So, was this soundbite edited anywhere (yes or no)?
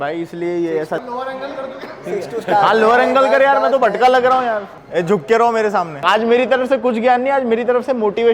yes